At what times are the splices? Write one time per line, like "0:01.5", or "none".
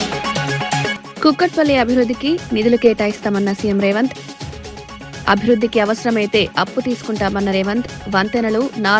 0:01.0